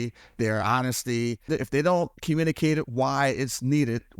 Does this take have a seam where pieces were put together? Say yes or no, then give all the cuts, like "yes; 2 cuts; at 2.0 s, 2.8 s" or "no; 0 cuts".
yes; 1 cut; at 1.5 s